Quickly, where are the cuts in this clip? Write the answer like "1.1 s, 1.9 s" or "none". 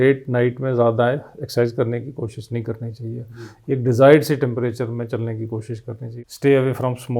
6.0 s